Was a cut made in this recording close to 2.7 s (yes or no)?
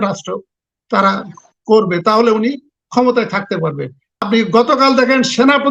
no